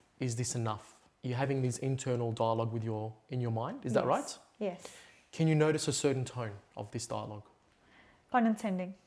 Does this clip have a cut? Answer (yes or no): no